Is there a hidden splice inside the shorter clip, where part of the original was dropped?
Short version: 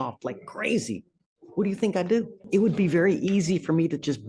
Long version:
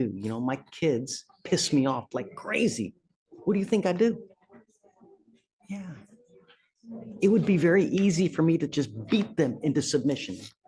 yes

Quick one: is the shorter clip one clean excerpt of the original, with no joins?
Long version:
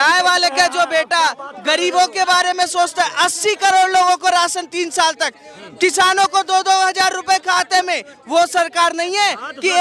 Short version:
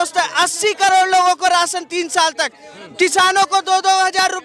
yes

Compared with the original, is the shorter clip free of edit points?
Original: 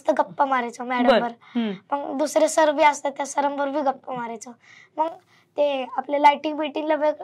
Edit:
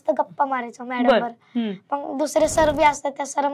yes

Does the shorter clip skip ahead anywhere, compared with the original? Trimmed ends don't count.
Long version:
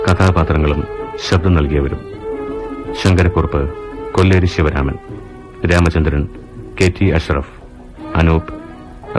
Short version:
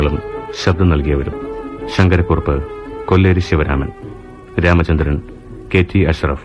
yes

